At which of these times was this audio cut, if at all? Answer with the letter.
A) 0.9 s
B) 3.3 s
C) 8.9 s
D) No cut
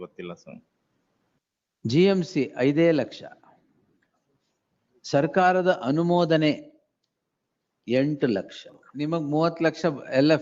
C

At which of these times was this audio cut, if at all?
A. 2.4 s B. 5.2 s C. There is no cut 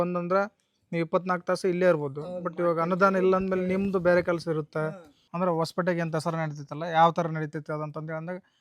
B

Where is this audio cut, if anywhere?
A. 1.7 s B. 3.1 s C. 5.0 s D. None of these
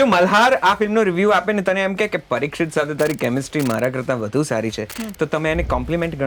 D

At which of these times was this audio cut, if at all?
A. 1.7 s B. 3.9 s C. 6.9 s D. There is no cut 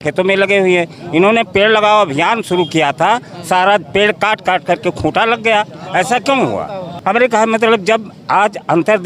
D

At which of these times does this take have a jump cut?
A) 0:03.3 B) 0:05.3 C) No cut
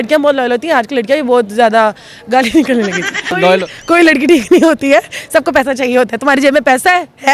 A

